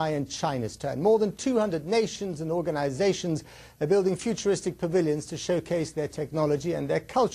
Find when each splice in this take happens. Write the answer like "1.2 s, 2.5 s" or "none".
none